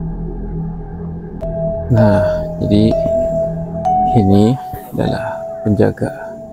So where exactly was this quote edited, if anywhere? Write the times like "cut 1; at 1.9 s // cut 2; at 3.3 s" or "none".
cut 1; at 1.5 s